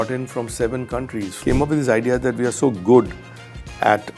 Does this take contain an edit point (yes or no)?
yes